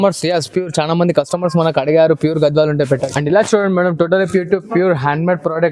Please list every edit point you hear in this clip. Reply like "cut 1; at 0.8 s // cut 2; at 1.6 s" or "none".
cut 1; at 3.1 s

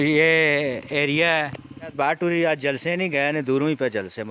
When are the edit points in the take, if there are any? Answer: cut 1; at 1.9 s

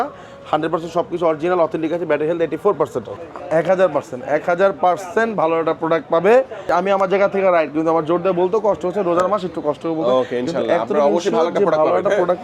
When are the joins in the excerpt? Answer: cut 1; at 3.1 s // cut 2; at 6.7 s

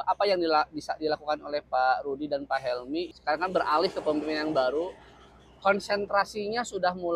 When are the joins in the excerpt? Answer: cut 1; at 3.1 s

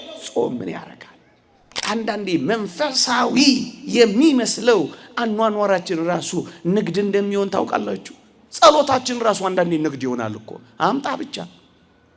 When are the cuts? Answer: cut 1; at 1.7 s

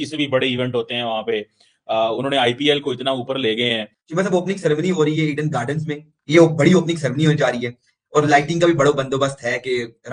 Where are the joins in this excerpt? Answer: cut 1; at 4.0 s // cut 2; at 6.1 s

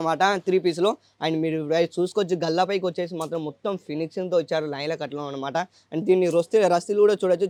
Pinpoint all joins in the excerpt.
none

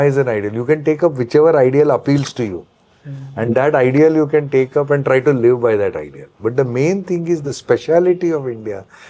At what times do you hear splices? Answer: none

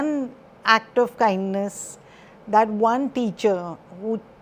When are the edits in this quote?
none

